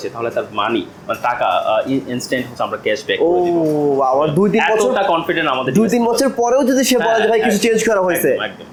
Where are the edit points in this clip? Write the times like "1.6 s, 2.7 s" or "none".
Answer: none